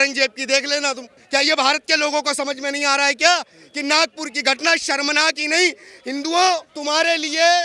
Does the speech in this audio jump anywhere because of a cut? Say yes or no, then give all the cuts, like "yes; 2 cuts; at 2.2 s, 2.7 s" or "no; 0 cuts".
yes; 2 cuts; at 1.1 s, 6.7 s